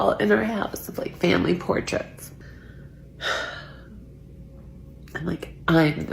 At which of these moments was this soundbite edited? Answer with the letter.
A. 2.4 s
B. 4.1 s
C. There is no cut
A